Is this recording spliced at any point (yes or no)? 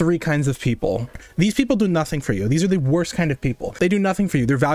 yes